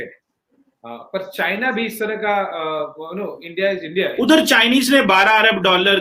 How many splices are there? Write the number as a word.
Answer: one